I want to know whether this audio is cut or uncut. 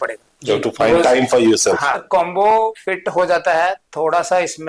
cut